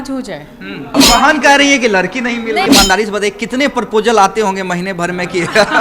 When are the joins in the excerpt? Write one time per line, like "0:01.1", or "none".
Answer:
0:01.0
0:02.7